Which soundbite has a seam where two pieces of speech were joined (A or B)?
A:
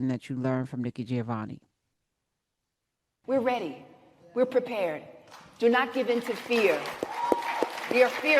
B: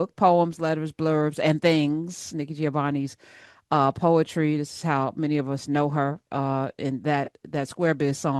A